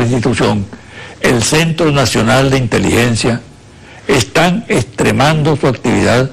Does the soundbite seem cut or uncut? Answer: uncut